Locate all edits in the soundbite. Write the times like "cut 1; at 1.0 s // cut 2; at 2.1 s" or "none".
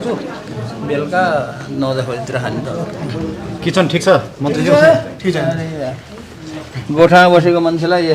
none